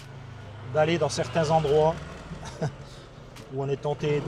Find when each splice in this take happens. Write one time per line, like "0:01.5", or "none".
none